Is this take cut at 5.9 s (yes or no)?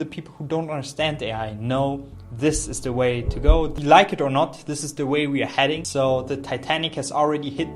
yes